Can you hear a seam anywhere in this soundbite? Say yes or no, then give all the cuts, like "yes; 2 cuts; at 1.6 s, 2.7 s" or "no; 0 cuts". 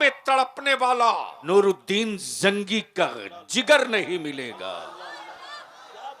yes; 1 cut; at 1.3 s